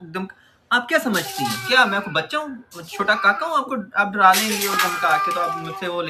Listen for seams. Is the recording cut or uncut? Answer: uncut